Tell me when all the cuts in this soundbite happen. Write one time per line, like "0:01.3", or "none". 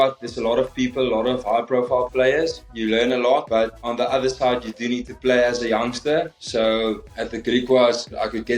0:02.6
0:03.5
0:06.3